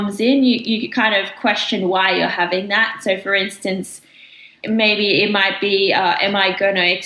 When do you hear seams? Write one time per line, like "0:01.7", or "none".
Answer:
0:04.5